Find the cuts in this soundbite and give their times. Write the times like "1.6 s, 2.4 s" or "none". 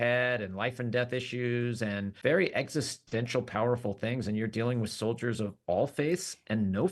2.1 s